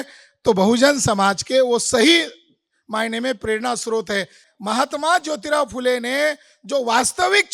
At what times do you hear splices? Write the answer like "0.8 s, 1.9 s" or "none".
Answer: 4.4 s